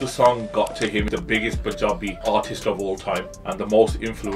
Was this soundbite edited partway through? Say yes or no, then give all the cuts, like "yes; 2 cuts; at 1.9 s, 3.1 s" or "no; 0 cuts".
yes; 3 cuts; at 1.1 s, 2.2 s, 3.4 s